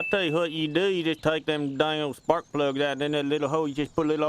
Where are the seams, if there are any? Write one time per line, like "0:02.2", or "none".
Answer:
0:01.2